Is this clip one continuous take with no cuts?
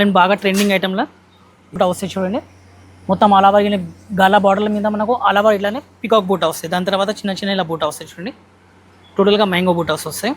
no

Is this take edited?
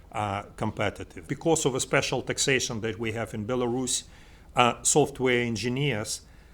yes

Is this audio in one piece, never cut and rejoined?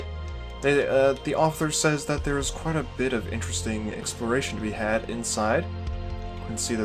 yes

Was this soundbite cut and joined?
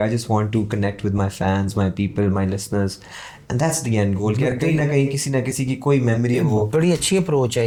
no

